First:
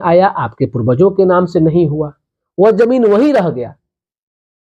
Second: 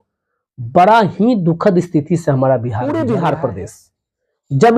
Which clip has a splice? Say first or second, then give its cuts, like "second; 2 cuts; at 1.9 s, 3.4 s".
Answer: second; 1 cut; at 2.8 s